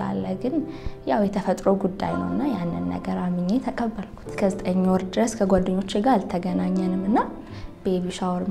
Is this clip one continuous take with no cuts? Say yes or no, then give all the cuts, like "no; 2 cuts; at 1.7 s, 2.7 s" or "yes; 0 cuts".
no; 1 cut; at 4.3 s